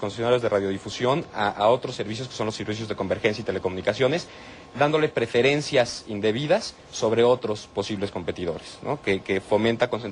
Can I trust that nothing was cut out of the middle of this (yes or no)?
no